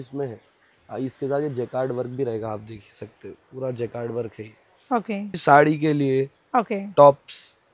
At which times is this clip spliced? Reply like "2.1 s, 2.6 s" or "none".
5.3 s